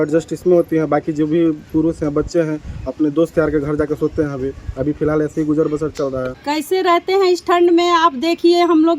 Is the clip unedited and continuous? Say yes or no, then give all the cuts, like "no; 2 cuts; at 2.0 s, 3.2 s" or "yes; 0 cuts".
yes; 0 cuts